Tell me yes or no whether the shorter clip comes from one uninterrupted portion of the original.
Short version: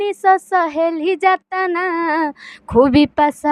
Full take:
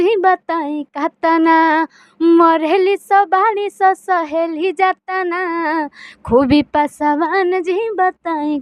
yes